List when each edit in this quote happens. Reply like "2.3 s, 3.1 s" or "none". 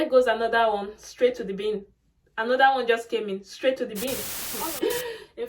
4.4 s